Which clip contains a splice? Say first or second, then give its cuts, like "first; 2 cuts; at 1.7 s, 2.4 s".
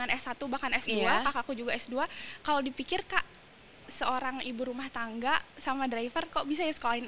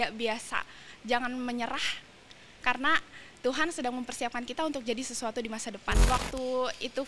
second; 1 cut; at 5.9 s